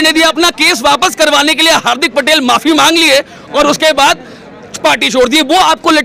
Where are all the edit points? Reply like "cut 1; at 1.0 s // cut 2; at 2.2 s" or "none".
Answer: none